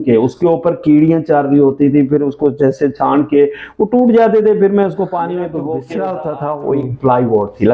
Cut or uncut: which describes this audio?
cut